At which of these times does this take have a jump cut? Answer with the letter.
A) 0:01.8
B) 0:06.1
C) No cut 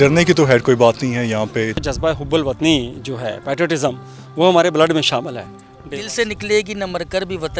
A